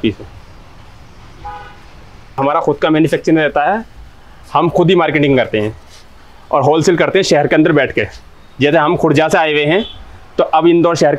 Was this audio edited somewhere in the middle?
yes; 1 cut; at 2.4 s

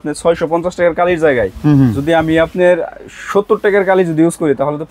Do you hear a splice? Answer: no; 0 cuts

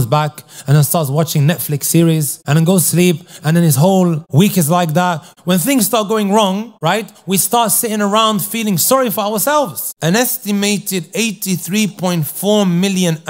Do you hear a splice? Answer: yes; 5 cuts; at 2.4 s, 4.2 s, 5.3 s, 6.7 s, 9.8 s

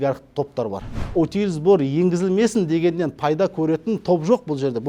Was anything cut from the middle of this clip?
yes; 1 cut; at 1.0 s

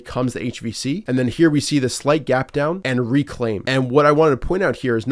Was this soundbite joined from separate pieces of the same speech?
yes; 3 cuts; at 1.0 s, 2.8 s, 3.6 s

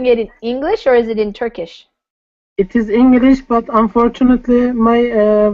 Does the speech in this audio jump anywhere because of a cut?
yes; 1 cut; at 3.7 s

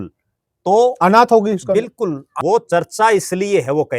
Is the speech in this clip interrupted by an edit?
yes; 1 cut; at 2.3 s

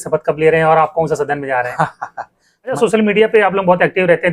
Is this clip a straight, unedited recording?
no; 1 cut; at 2.8 s

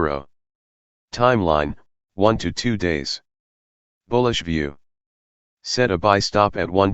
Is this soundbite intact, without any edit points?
yes; 0 cuts

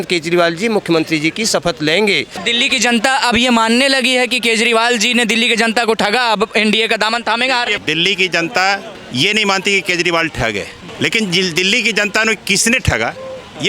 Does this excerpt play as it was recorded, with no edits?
no; 4 cuts; at 2.4 s, 7.8 s, 9.0 s, 10.8 s

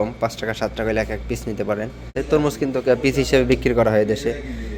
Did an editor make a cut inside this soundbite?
yes; 1 cut; at 2.2 s

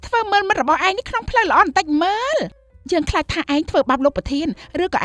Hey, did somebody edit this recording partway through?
yes; 1 cut; at 2.7 s

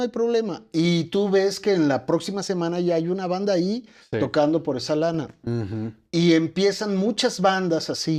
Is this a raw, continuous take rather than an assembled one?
yes; 0 cuts

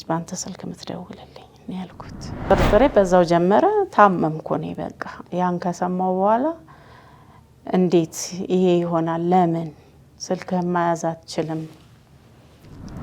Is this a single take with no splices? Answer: no; 1 cut; at 2.4 s

